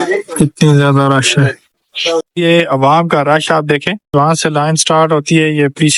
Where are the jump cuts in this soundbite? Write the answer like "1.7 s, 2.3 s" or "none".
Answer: none